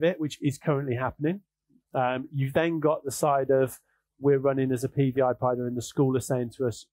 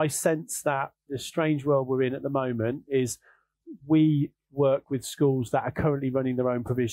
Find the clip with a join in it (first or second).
second